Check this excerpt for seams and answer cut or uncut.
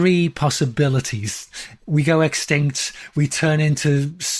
cut